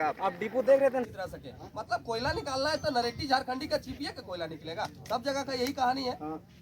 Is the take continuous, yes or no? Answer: no